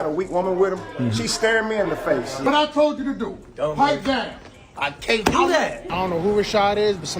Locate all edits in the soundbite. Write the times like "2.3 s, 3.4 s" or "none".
2.5 s, 5.9 s